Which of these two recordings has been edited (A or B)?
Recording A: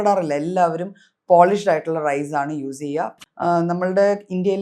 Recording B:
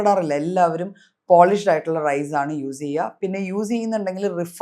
A